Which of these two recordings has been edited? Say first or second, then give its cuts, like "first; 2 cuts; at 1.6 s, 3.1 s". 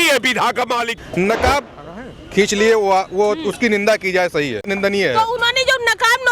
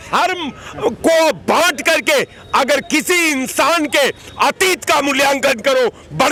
first; 2 cuts; at 1.0 s, 4.7 s